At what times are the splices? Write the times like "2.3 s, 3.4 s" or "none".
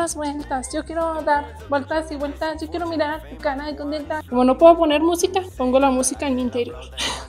4.2 s, 5.5 s